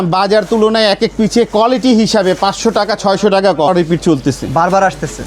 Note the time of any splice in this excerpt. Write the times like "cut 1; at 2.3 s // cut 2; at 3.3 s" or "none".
cut 1; at 3.7 s